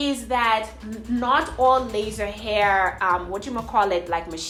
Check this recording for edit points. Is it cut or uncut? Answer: uncut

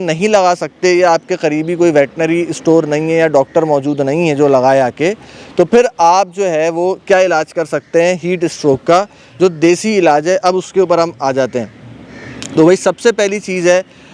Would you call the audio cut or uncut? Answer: uncut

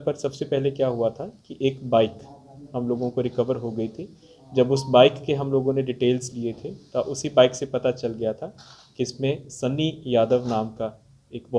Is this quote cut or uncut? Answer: uncut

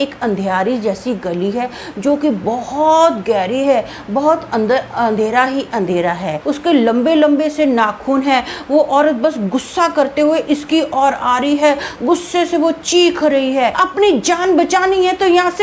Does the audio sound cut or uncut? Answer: cut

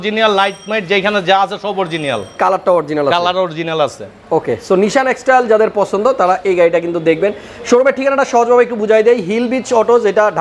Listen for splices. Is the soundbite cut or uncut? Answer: uncut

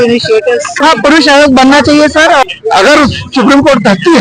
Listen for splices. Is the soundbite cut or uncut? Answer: cut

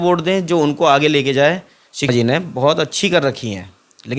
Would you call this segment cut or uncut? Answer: cut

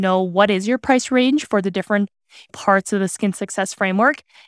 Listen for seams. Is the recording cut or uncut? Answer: uncut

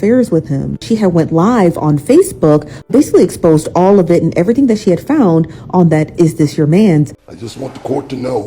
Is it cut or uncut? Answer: cut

